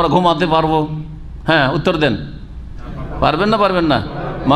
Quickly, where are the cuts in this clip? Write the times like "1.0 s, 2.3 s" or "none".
none